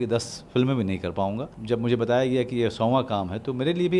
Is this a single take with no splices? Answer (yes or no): no